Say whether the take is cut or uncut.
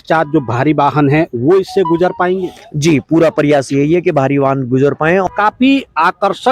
cut